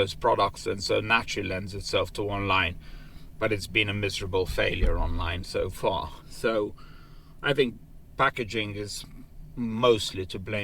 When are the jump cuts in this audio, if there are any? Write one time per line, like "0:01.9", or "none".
0:06.2